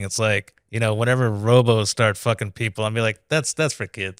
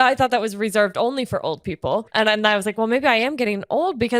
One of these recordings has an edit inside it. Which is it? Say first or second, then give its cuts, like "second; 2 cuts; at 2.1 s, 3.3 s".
second; 1 cut; at 2.0 s